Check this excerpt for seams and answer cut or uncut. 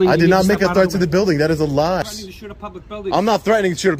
cut